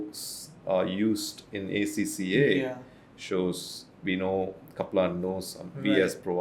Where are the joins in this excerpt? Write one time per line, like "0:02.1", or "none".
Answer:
none